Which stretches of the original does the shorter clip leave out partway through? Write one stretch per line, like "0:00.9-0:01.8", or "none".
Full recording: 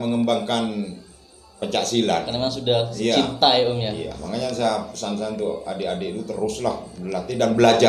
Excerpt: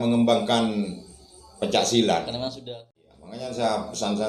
0:02.7-0:03.7